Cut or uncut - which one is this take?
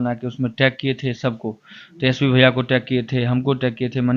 uncut